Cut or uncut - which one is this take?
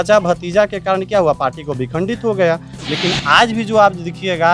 cut